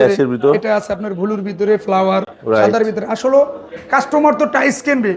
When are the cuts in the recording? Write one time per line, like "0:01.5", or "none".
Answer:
none